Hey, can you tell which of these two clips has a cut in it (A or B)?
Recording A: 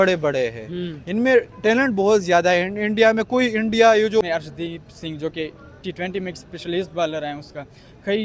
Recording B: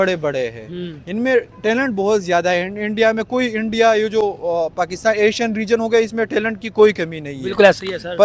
A